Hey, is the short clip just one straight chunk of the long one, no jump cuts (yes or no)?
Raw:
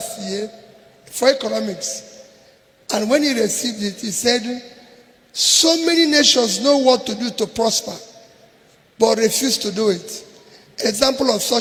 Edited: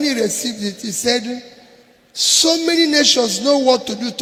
yes